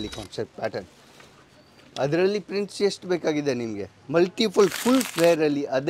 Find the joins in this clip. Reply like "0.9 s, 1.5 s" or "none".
3.9 s